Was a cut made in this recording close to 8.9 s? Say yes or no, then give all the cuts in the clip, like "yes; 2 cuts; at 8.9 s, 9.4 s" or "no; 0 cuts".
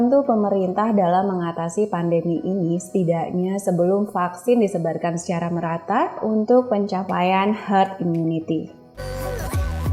yes; 1 cut; at 8.9 s